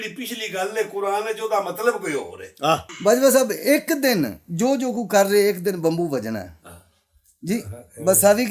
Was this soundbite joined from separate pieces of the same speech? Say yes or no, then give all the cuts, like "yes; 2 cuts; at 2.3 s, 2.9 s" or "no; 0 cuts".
yes; 1 cut; at 2.9 s